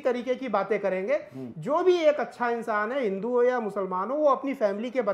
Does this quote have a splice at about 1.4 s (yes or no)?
no